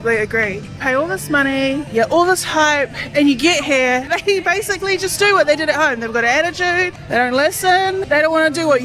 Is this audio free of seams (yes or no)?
no